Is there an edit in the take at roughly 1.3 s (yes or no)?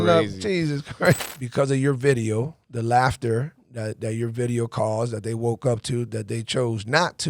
yes